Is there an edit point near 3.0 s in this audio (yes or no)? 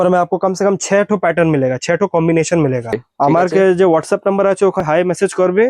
yes